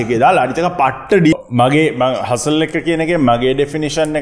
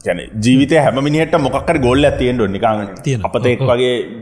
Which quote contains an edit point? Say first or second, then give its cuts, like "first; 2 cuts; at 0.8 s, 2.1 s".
first; 1 cut; at 1.3 s